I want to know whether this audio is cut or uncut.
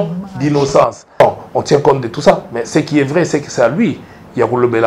cut